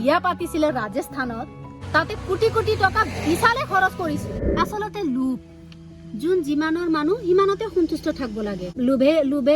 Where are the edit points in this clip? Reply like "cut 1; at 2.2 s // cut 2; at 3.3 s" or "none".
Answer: cut 1; at 4.3 s // cut 2; at 8.7 s